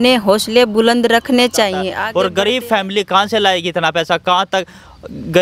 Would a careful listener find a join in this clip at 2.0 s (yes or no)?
yes